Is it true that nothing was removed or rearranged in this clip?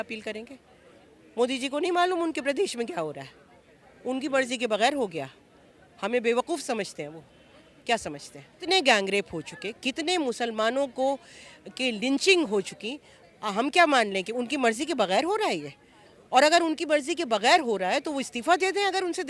no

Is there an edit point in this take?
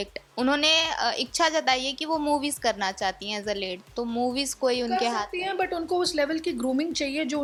no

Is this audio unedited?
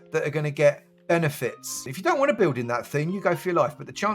no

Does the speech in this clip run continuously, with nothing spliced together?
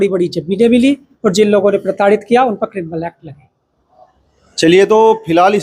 yes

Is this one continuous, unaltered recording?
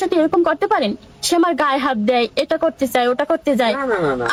yes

